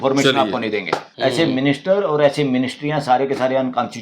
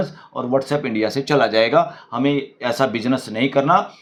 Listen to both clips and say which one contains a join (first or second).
first